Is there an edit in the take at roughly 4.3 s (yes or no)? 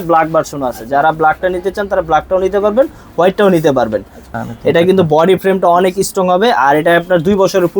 yes